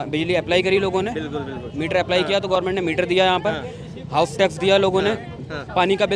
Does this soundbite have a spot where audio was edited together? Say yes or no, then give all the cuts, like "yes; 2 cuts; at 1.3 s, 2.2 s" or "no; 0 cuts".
no; 0 cuts